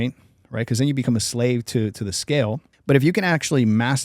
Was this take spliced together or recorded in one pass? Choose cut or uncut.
cut